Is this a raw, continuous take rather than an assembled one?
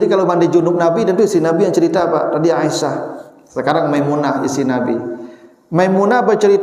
yes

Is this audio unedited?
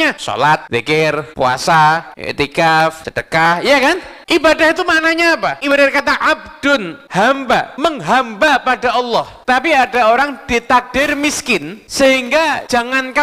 no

